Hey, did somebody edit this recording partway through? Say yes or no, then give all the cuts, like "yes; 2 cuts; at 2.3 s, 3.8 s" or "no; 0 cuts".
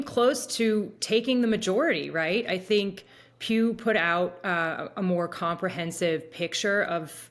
no; 0 cuts